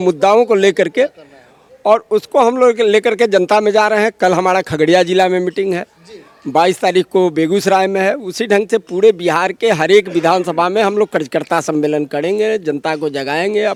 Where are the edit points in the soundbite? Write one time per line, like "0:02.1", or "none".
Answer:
none